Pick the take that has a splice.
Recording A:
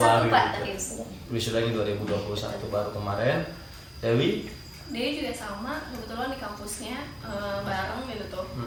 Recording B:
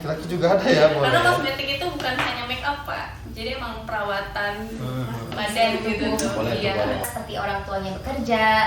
B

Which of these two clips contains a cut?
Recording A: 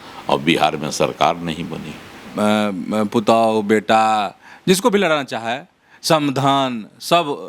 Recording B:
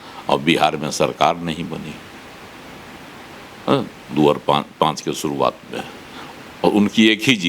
A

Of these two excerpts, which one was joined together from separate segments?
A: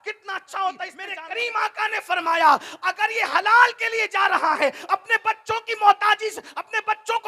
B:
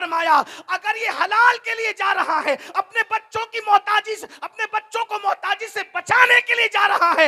A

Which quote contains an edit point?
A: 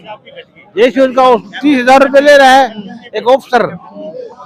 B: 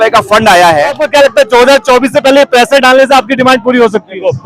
B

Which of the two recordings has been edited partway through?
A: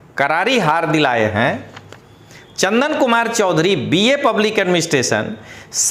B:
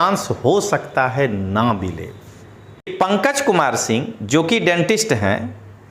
B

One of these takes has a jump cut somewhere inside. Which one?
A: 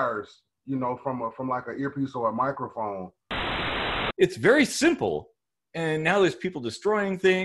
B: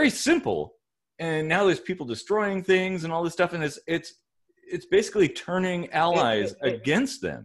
A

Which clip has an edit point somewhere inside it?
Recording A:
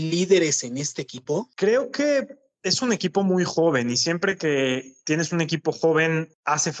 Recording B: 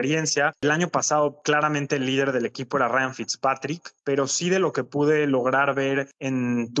A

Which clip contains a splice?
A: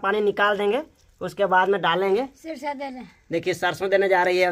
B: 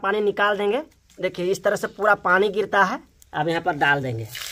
B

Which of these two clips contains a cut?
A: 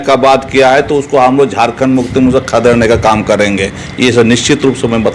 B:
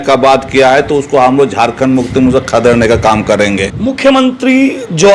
B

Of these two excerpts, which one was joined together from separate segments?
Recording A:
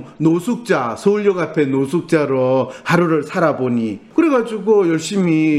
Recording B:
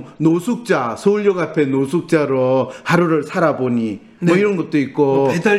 A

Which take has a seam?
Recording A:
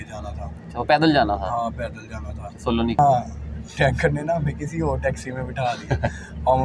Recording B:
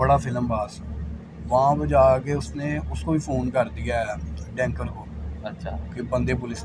A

